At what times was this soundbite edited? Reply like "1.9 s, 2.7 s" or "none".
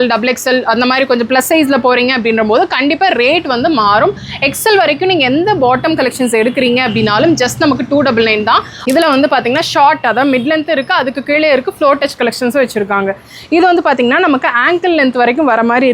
8.7 s